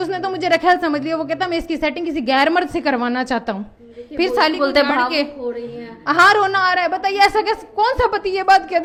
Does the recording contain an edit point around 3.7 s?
no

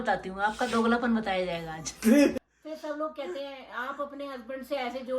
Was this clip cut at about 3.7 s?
no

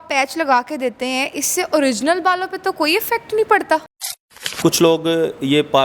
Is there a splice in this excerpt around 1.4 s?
no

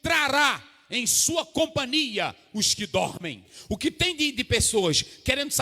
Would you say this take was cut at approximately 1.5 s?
no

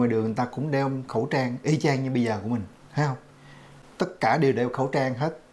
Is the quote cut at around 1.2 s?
no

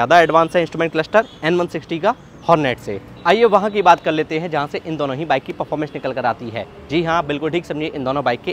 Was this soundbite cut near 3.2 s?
no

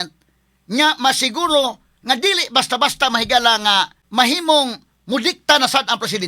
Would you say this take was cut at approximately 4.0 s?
yes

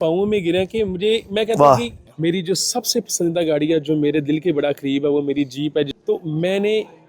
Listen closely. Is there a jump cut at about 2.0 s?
yes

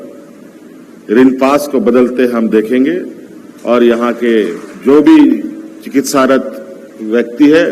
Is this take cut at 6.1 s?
no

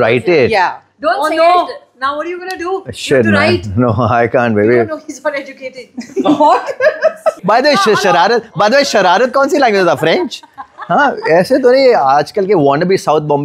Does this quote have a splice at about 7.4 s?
yes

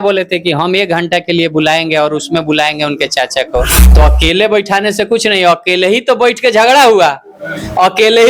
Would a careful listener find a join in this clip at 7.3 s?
no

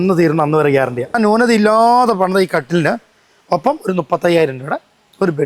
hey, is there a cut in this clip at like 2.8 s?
no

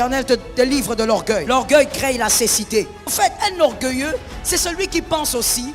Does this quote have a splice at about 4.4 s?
no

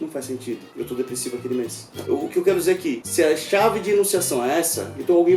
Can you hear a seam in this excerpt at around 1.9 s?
yes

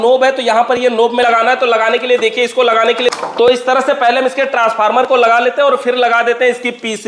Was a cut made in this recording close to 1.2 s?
yes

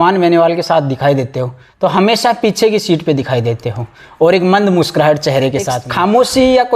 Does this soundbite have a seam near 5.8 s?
yes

